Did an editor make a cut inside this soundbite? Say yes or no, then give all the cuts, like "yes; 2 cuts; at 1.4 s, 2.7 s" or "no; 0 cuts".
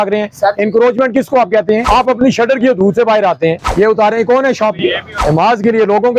yes; 3 cuts; at 1.8 s, 3.6 s, 5.1 s